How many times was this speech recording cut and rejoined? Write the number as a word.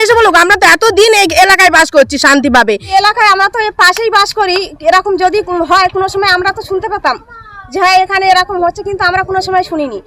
one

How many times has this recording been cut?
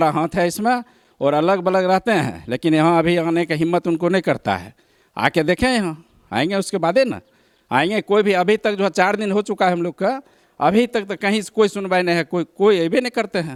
zero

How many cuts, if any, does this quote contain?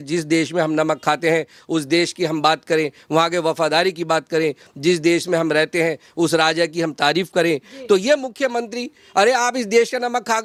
zero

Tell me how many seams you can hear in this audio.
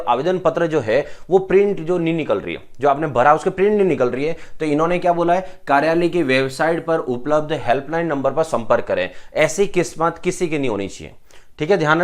zero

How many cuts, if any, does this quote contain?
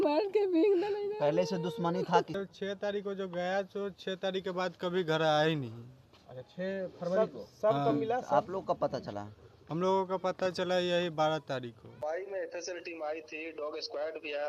two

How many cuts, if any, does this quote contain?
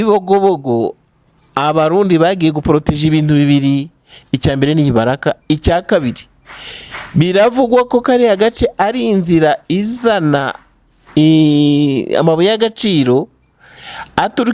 zero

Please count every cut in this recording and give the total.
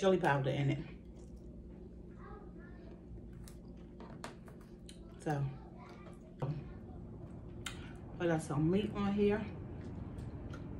one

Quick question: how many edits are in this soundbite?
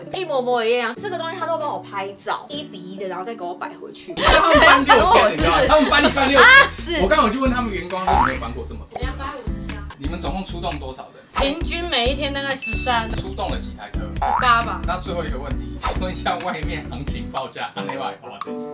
three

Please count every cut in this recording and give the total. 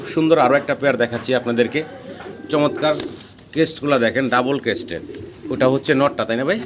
zero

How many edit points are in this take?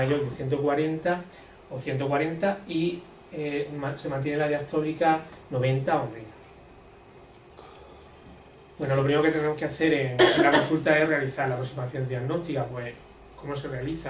one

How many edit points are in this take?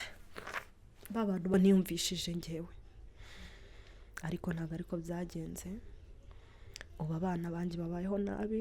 one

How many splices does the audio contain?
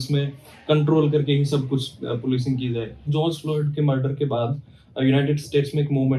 one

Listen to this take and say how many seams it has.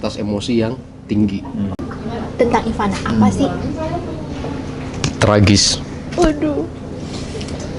one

